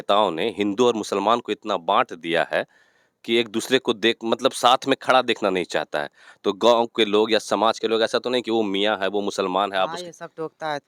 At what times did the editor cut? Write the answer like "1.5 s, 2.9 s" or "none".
none